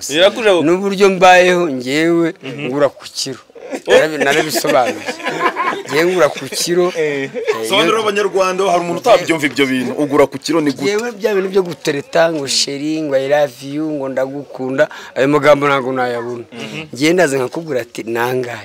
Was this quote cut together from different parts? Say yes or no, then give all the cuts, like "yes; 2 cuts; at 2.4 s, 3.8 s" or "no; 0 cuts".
no; 0 cuts